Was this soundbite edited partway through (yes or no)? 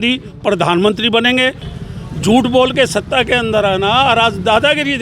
yes